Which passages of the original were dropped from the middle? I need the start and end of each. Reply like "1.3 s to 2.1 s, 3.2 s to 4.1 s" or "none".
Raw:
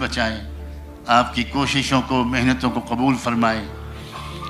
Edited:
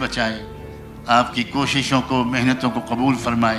none